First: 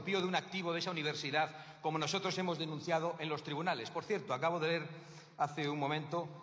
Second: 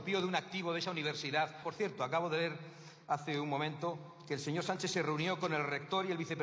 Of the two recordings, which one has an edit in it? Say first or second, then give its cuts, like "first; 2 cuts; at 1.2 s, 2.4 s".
second; 1 cut; at 1.6 s